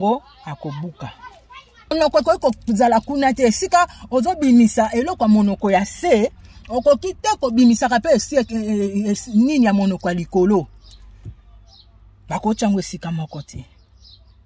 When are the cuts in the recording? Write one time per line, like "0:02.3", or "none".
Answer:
0:01.9